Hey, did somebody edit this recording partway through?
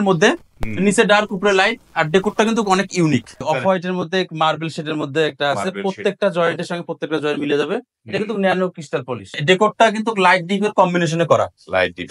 yes; 2 cuts; at 3.4 s, 9.4 s

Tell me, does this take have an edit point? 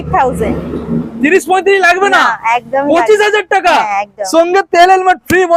no; 0 cuts

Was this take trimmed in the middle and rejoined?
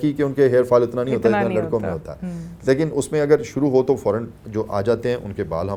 no; 0 cuts

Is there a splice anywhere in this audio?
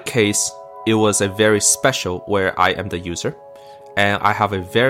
no; 0 cuts

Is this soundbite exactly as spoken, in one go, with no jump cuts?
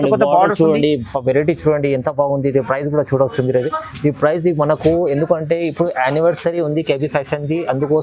yes; 0 cuts

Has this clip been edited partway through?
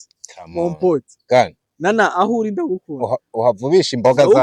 no; 0 cuts

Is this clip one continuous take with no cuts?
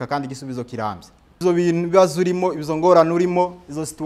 no; 1 cut; at 1.4 s

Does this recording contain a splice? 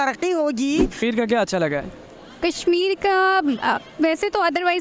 yes; 1 cut; at 1.0 s

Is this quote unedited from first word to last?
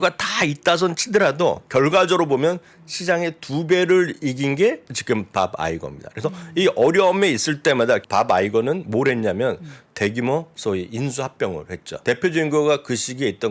no; 4 cuts; at 4.9 s, 8.0 s, 10.5 s, 11.9 s

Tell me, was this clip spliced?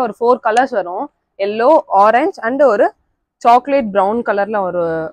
no; 0 cuts

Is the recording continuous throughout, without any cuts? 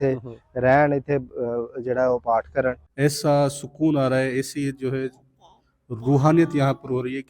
no; 1 cut; at 2.8 s

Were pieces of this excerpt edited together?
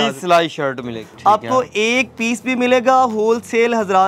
yes; 1 cut; at 1.0 s

